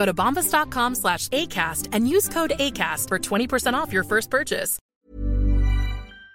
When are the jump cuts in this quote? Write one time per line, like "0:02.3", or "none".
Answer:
0:04.8